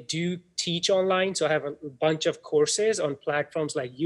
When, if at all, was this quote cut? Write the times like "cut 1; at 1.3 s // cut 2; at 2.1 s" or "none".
none